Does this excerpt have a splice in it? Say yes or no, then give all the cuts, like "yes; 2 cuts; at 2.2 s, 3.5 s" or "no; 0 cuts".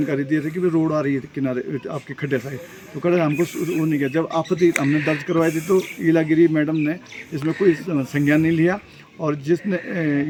no; 0 cuts